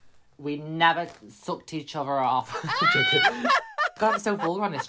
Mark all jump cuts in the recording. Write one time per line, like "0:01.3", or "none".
0:03.9